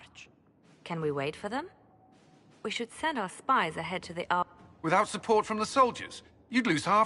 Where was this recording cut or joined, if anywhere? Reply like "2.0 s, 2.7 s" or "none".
4.5 s